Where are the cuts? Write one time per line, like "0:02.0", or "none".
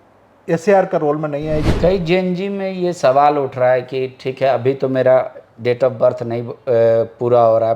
0:01.7